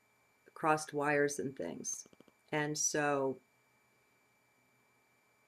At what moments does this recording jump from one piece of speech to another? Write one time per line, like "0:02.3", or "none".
0:01.3